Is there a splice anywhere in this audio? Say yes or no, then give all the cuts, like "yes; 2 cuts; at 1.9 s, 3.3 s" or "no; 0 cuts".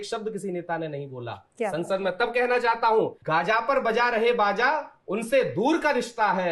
yes; 1 cut; at 3.2 s